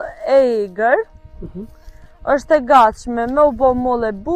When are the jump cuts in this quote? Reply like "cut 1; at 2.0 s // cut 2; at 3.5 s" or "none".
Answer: none